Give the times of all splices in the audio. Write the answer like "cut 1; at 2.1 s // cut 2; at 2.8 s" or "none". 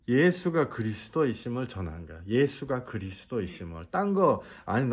none